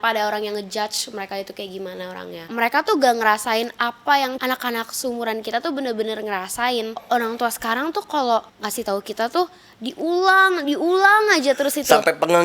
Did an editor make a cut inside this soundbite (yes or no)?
yes